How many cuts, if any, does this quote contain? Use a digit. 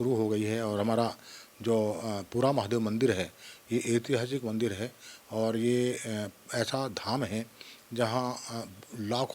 0